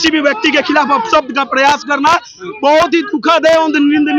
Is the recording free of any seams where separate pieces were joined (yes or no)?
yes